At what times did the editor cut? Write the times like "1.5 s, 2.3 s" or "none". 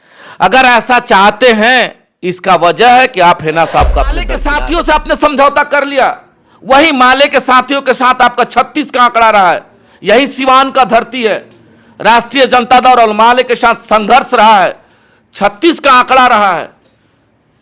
4.4 s